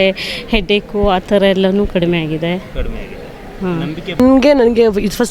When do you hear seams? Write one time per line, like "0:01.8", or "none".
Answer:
0:04.2